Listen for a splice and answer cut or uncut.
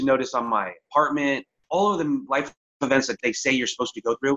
cut